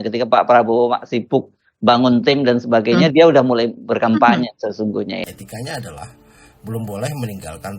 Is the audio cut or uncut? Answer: cut